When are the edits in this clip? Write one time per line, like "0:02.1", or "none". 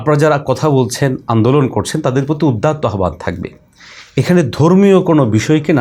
none